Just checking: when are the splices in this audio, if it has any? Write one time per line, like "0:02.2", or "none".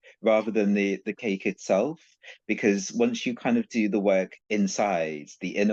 0:04.4

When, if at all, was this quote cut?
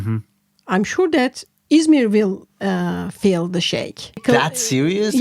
0:04.2

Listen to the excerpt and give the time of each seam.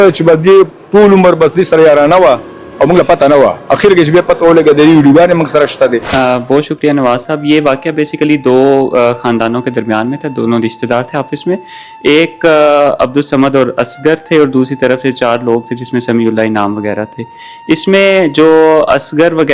0:06.0

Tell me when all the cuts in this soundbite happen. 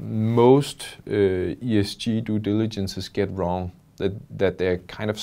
none

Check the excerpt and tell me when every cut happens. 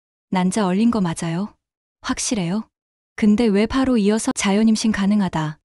0:04.3

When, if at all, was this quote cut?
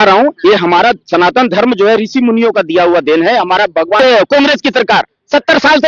0:04.0

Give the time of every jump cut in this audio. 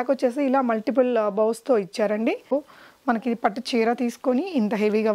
0:02.5

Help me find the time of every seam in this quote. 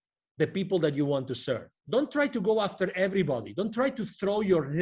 0:01.7

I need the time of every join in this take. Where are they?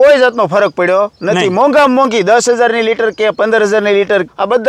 none

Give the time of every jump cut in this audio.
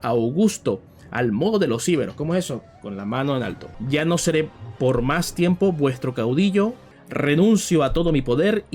0:03.7
0:06.9

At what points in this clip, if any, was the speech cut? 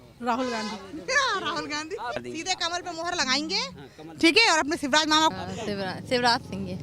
0:02.2
0:05.3

